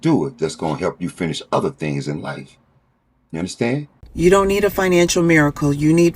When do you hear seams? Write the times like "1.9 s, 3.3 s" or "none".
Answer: 4.0 s